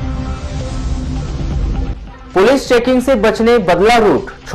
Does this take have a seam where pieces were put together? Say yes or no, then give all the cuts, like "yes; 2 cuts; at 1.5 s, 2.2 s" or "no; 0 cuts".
no; 0 cuts